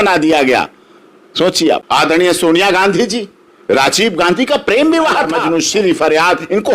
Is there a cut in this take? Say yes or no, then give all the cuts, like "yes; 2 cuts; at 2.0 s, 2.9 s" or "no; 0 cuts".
yes; 2 cuts; at 1.8 s, 5.4 s